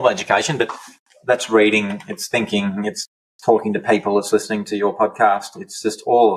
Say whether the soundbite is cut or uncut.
uncut